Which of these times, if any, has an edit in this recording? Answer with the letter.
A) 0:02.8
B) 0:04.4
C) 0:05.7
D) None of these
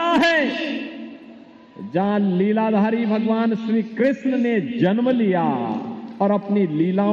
A